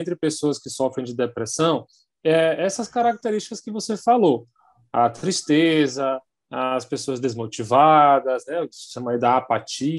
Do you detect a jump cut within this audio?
no; 0 cuts

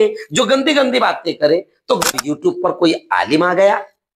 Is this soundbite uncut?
no; 1 cut; at 2.0 s

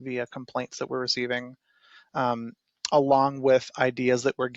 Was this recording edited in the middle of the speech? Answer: no; 0 cuts

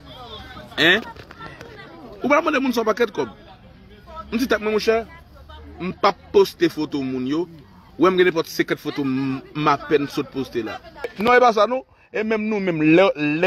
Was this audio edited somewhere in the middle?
yes; 1 cut; at 11.2 s

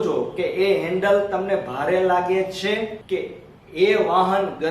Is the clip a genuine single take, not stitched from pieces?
no; 1 cut; at 3.0 s

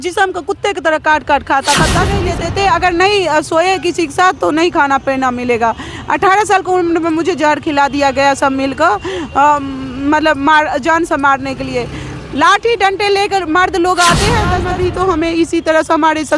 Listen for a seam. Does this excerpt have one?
yes; 2 cuts; at 2.2 s, 14.6 s

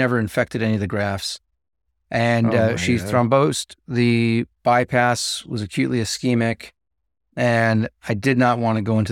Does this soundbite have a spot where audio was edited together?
no; 0 cuts

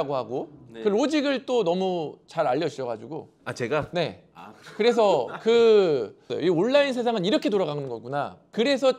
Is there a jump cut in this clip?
yes; 1 cut; at 6.3 s

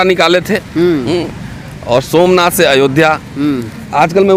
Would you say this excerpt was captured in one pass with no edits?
yes; 0 cuts

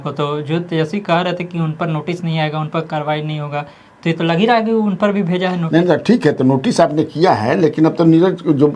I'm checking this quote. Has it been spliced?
no; 0 cuts

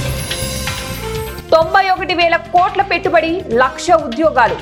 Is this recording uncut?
yes; 0 cuts

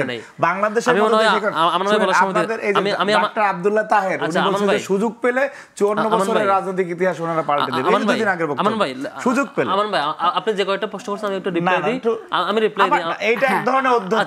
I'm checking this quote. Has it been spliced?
no; 0 cuts

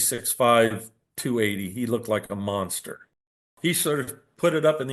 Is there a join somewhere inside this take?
yes; 1 cut; at 3.5 s

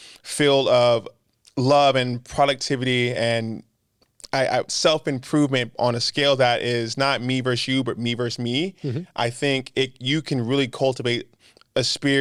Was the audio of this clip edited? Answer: no; 0 cuts

